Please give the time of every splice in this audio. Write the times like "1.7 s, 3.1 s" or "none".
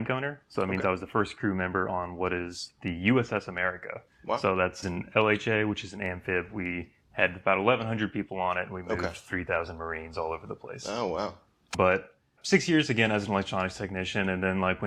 none